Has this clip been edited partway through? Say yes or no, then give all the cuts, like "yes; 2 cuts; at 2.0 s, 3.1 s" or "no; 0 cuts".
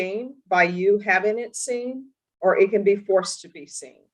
no; 0 cuts